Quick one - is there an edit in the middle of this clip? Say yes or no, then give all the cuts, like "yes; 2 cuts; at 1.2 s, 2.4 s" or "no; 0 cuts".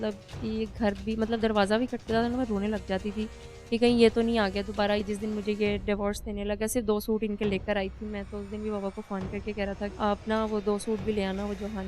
yes; 2 cuts; at 5.0 s, 9.9 s